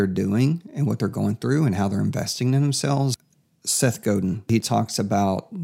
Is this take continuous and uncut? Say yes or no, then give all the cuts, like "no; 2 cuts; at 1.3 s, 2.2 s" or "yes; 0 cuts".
no; 2 cuts; at 3.2 s, 4.5 s